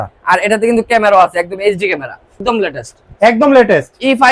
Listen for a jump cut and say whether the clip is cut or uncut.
cut